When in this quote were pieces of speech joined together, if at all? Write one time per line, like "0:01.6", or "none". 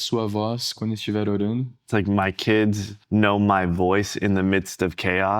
0:01.8
0:02.9